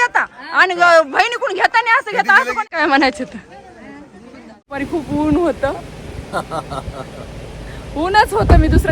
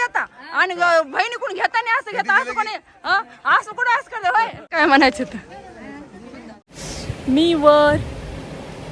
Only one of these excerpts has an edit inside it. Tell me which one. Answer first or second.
first